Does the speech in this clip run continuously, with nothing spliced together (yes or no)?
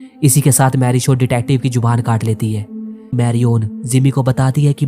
no